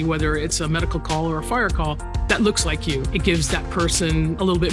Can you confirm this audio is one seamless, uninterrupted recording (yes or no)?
yes